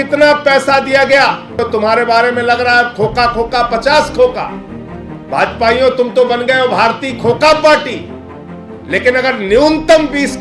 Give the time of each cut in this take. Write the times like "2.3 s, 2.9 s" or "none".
1.5 s